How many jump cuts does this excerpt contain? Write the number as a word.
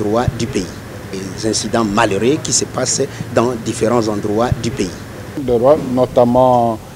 two